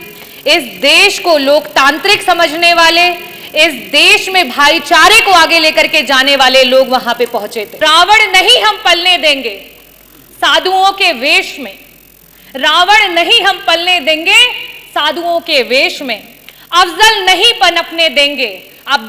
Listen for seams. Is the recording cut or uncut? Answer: cut